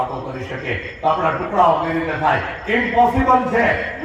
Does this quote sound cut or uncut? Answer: uncut